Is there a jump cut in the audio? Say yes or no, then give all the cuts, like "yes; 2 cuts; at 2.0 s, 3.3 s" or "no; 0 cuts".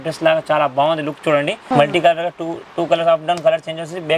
yes; 1 cut; at 1.6 s